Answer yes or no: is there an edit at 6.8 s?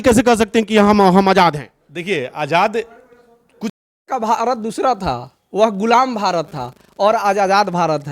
no